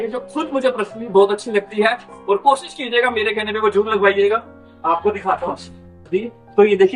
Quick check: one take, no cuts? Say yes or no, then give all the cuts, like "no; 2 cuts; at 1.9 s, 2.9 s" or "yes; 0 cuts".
no; 1 cut; at 6.1 s